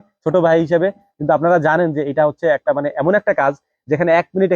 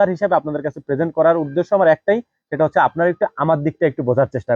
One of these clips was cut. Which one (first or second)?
first